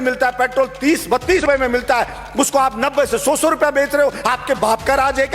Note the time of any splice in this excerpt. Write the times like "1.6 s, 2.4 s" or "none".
1.4 s